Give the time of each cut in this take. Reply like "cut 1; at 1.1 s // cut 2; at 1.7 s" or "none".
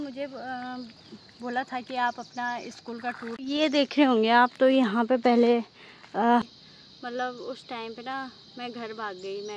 cut 1; at 3.4 s // cut 2; at 6.4 s